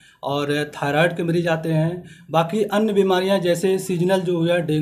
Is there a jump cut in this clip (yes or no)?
no